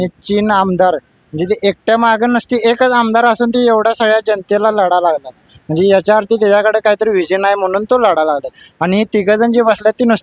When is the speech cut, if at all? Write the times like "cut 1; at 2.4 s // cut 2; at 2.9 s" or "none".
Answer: none